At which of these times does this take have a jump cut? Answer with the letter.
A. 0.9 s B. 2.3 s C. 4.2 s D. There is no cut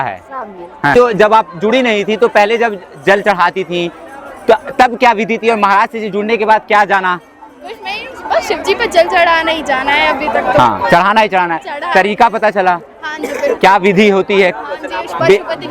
A